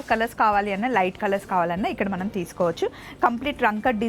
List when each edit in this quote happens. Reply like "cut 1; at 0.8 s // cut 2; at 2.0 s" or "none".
none